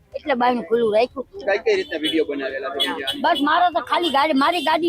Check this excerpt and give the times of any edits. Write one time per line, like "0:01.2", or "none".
0:01.4